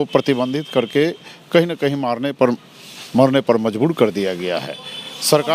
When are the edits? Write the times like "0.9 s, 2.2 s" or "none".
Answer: none